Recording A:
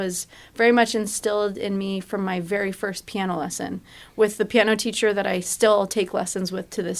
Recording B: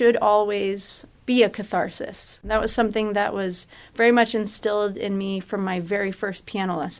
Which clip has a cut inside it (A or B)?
B